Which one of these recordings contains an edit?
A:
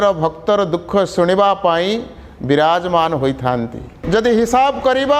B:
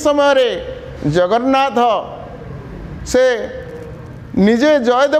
A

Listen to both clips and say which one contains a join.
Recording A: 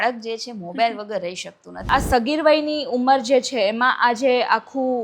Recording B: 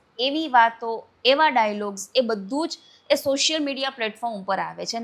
A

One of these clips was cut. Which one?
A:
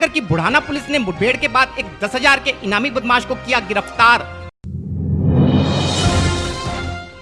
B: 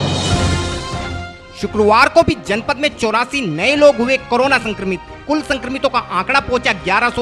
B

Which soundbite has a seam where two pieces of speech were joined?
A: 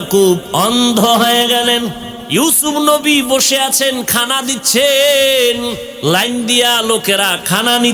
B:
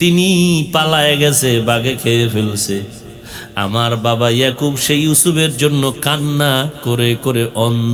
A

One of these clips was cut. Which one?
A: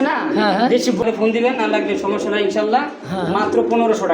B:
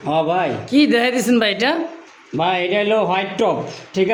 A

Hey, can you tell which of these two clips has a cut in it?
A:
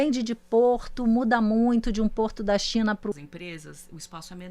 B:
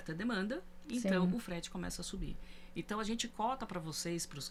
A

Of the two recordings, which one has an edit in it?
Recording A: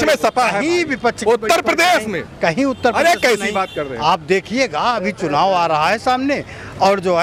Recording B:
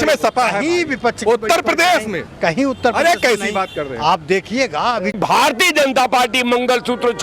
B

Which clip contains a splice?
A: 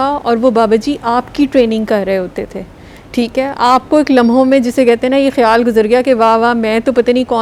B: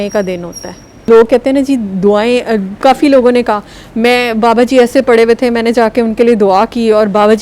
B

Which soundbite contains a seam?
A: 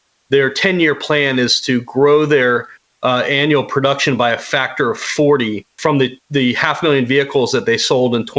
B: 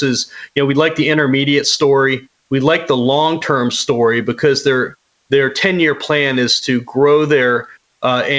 A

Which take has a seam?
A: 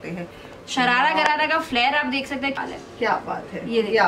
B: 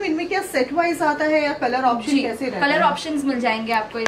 A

